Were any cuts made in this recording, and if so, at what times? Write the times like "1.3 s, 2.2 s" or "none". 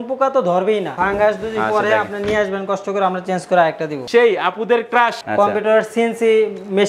0.9 s, 4.1 s, 5.2 s